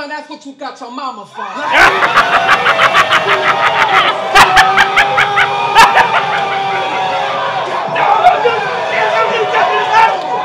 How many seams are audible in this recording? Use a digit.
0